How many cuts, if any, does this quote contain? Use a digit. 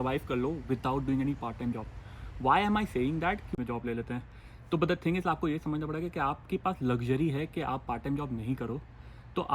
1